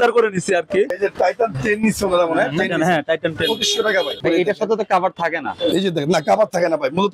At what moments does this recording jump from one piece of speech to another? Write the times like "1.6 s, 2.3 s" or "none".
0.9 s, 4.2 s